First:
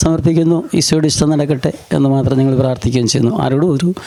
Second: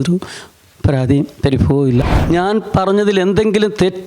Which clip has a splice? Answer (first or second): second